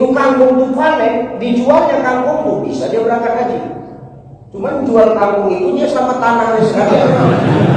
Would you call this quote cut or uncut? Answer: uncut